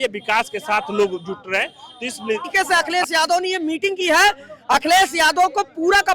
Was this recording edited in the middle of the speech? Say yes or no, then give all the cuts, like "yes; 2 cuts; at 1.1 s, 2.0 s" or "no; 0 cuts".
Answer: yes; 1 cut; at 2.5 s